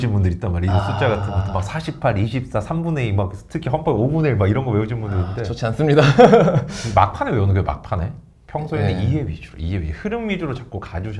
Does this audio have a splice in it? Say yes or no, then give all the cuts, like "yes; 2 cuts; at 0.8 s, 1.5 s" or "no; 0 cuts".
no; 0 cuts